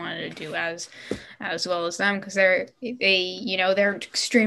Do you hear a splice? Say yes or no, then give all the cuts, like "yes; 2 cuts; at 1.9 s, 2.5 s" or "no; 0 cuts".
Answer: no; 0 cuts